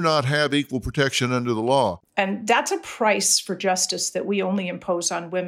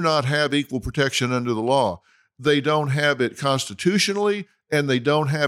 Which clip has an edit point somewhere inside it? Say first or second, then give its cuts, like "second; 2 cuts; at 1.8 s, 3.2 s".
first; 1 cut; at 2.0 s